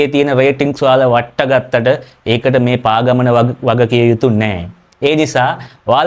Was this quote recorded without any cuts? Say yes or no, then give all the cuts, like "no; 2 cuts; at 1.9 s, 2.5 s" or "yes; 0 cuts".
yes; 0 cuts